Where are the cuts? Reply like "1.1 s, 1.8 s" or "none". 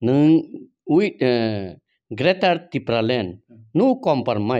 none